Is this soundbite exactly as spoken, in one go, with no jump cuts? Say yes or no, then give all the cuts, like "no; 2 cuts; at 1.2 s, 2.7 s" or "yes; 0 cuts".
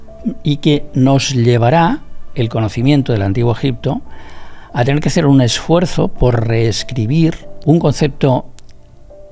no; 1 cut; at 7.6 s